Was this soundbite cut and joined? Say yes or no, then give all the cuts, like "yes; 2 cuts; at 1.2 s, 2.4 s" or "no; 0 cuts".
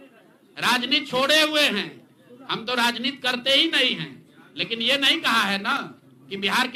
no; 0 cuts